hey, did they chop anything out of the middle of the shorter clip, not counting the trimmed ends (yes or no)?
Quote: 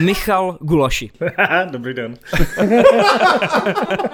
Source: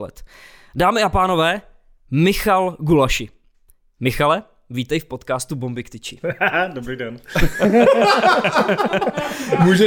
yes